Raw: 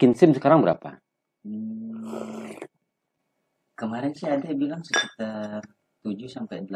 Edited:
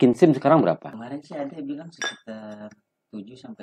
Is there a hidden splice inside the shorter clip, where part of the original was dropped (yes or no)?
yes